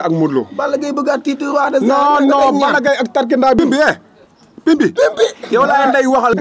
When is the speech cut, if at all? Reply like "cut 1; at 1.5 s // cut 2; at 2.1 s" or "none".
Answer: cut 1; at 3.6 s